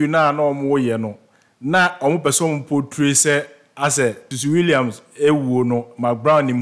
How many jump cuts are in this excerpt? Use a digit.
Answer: 1